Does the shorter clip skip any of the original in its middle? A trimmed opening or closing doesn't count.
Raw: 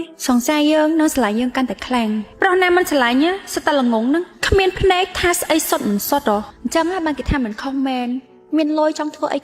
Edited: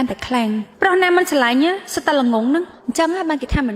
yes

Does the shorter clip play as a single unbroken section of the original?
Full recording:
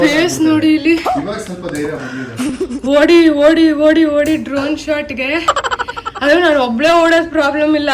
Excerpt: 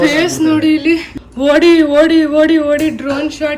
no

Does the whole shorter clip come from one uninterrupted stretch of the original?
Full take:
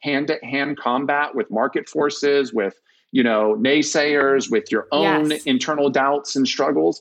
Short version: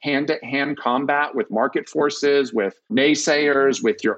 no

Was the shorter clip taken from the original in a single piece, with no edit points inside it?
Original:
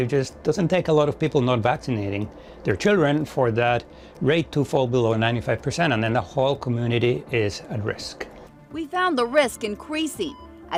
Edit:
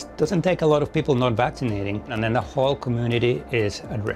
no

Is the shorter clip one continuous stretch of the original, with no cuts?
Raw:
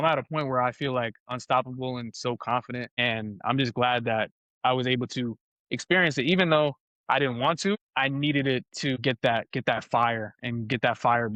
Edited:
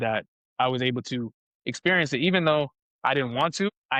yes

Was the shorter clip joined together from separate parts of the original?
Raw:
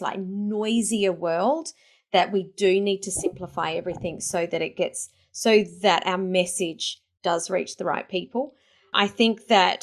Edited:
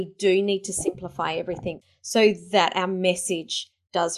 yes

